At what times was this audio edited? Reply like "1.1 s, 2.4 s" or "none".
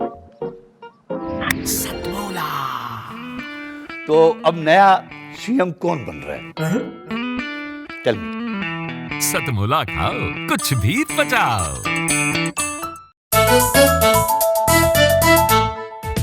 13.2 s

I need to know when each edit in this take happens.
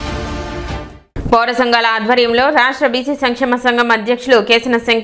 1.0 s

